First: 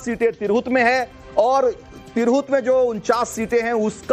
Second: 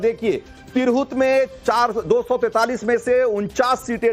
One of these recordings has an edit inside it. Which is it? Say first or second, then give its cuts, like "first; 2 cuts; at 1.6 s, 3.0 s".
second; 1 cut; at 2.5 s